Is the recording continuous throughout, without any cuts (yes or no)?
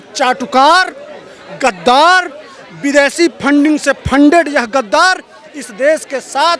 yes